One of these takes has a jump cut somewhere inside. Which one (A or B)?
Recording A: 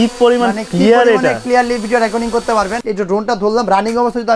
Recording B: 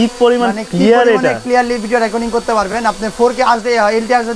A